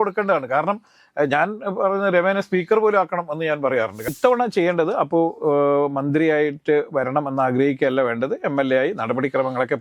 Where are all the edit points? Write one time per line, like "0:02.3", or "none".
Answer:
0:04.1